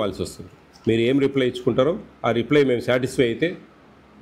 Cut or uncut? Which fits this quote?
uncut